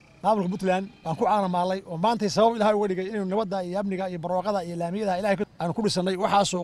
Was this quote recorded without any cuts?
no; 2 cuts; at 1.0 s, 5.5 s

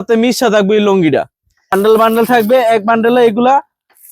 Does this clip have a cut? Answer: yes; 1 cut; at 1.7 s

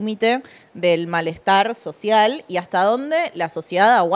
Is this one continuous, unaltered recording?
yes; 0 cuts

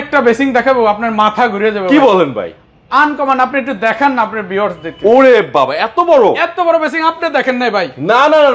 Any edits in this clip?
no; 0 cuts

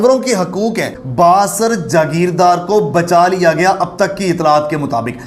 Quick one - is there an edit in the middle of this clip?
yes; 1 cut; at 0.9 s

